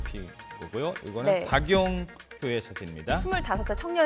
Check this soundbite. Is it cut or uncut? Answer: uncut